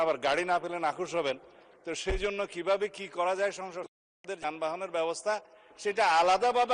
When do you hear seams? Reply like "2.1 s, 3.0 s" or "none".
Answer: none